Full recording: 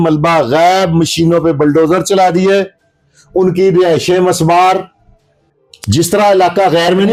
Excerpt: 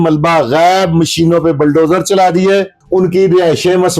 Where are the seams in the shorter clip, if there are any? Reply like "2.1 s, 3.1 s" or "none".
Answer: 2.8 s